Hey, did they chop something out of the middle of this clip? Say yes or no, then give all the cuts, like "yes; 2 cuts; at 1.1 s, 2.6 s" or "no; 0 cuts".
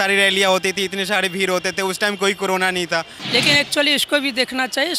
yes; 1 cut; at 3.2 s